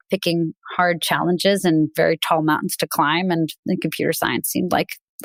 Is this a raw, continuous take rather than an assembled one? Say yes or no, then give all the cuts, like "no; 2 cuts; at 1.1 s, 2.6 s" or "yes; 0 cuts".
yes; 0 cuts